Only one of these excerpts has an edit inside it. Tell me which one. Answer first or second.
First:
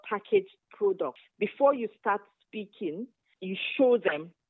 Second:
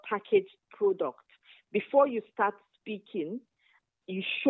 first